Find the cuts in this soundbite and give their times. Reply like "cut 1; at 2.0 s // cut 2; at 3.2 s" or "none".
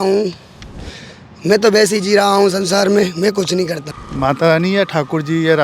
cut 1; at 3.9 s